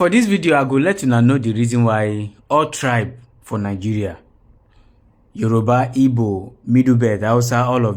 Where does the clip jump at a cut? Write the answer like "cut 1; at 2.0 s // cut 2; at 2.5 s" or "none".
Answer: none